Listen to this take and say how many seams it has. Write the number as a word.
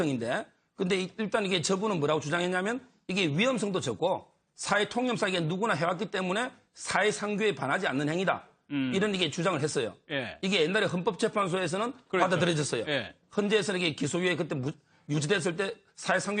one